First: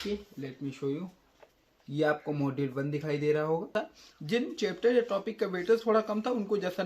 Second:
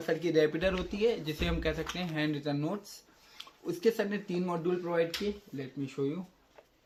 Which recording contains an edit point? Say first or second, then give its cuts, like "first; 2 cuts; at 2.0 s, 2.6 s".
first; 1 cut; at 3.7 s